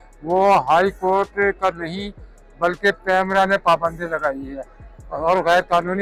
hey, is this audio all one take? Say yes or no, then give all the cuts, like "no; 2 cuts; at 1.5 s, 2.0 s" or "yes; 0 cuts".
yes; 0 cuts